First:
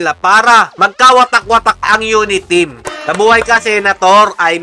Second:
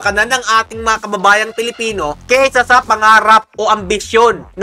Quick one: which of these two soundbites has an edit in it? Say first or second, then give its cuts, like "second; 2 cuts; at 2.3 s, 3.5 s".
first; 2 cuts; at 1.8 s, 2.8 s